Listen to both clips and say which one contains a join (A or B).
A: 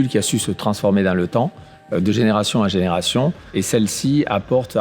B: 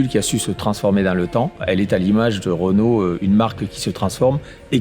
B